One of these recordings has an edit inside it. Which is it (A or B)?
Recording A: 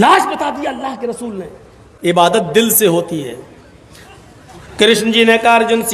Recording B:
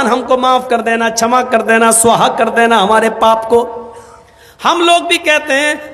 A